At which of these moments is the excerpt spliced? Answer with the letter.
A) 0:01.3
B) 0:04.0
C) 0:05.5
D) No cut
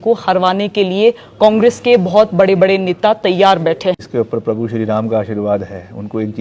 B